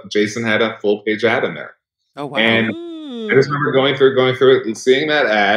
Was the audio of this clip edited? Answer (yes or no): no